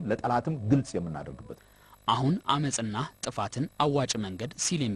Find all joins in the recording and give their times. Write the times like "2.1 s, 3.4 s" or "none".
none